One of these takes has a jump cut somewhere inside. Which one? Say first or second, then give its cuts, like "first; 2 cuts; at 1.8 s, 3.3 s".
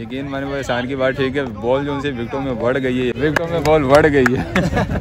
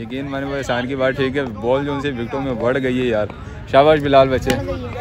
first; 1 cut; at 3.1 s